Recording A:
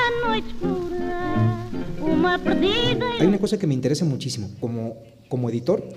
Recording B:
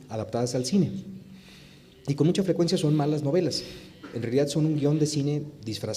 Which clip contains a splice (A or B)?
B